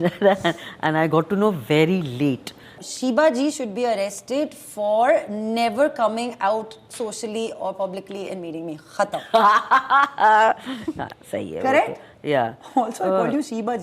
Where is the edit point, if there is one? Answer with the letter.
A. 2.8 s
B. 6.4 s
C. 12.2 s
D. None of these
A